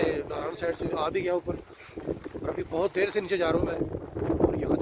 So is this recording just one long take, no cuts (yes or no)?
yes